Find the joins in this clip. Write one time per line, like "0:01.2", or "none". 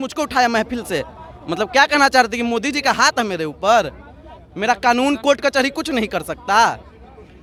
none